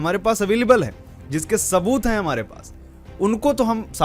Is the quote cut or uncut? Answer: uncut